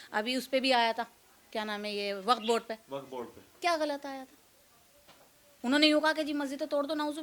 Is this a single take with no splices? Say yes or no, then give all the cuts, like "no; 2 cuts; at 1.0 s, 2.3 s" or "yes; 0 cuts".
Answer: yes; 0 cuts